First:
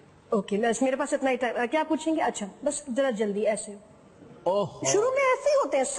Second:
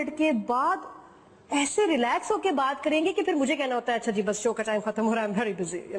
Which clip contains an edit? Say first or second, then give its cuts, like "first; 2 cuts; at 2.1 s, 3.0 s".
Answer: first; 1 cut; at 2.8 s